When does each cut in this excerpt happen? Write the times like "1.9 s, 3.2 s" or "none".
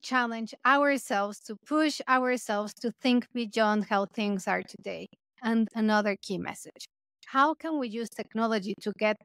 5.5 s